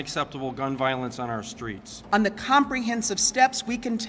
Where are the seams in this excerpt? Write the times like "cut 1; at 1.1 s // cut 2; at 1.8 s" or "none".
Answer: cut 1; at 1.9 s